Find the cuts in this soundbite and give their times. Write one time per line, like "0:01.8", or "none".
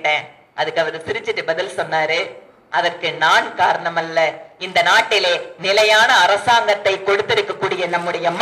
none